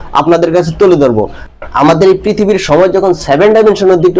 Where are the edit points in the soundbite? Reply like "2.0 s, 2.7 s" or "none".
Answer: 1.4 s

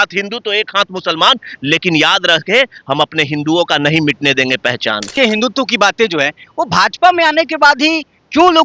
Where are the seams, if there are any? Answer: 5.2 s

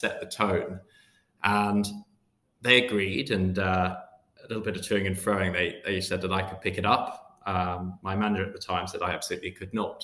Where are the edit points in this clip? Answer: none

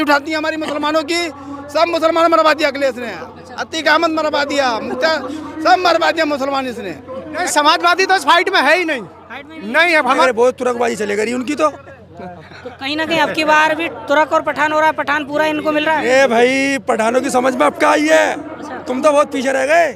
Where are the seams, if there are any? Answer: 7.4 s, 10.1 s

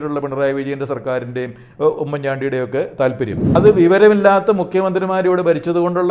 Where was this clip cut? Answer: 3.5 s

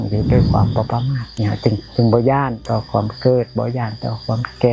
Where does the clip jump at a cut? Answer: 1.2 s, 2.6 s

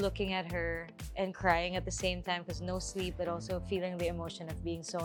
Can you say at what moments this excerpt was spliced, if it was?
none

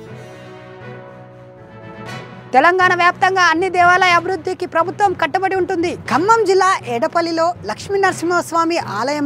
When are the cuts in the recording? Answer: 1.9 s

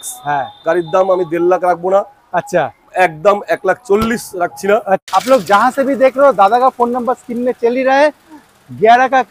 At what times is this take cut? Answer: 5.0 s

